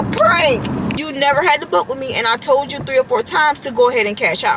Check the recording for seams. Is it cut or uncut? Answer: cut